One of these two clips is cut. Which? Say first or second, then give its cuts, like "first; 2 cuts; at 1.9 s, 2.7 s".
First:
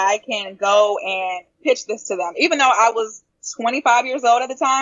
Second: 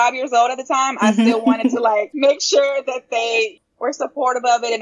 second; 2 cuts; at 2.1 s, 3.6 s